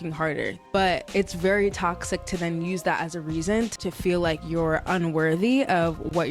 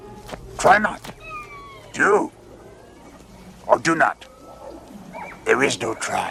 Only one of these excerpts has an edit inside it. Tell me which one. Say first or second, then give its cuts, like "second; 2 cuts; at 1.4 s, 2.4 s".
first; 2 cuts; at 0.8 s, 3.8 s